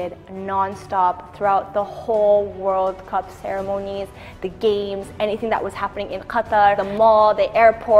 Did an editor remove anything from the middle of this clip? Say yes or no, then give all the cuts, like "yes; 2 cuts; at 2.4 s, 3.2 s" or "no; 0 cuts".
yes; 1 cut; at 6.8 s